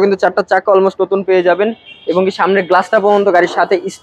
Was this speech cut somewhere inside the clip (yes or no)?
no